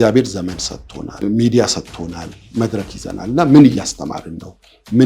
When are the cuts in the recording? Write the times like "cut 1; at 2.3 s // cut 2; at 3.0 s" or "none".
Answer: cut 1; at 1.2 s // cut 2; at 2.4 s